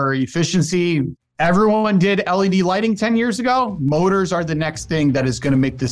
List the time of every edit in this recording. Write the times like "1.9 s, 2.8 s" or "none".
1.2 s